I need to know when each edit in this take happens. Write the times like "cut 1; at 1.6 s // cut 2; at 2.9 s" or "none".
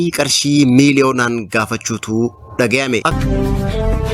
cut 1; at 3.1 s